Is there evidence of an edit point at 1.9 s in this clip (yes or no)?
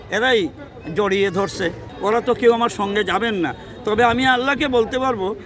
yes